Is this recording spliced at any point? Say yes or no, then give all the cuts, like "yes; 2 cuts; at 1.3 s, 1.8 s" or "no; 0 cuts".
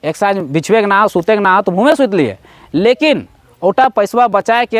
no; 0 cuts